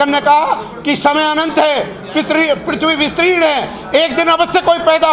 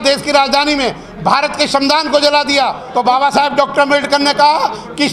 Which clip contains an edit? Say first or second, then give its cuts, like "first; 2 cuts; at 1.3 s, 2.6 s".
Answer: second; 1 cut; at 2.8 s